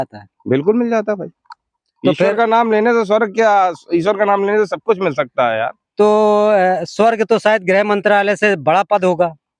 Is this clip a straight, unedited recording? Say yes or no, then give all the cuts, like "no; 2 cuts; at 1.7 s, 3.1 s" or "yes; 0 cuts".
yes; 0 cuts